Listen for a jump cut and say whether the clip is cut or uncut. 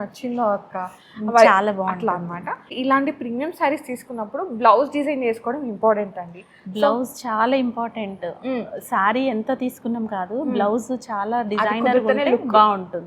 cut